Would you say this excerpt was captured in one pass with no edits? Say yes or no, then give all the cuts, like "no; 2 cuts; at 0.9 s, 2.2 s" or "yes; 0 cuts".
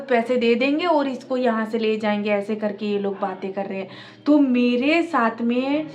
yes; 0 cuts